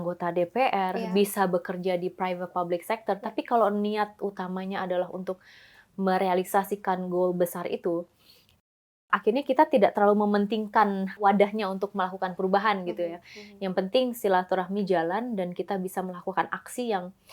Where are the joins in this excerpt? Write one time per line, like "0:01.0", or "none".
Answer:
0:11.2